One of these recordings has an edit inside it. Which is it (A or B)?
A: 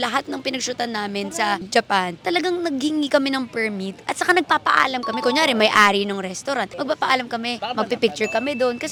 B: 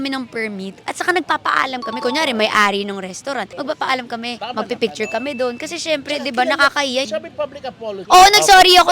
B